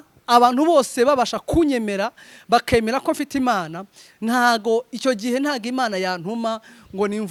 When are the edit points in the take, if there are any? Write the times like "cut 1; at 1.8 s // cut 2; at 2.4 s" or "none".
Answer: none